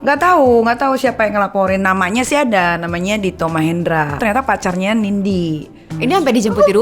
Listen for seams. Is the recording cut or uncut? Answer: cut